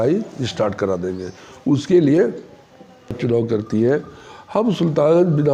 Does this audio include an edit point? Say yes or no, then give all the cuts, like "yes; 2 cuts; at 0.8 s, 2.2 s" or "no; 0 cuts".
yes; 1 cut; at 3.2 s